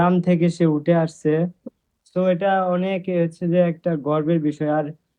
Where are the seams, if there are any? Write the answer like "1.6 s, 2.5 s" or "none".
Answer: none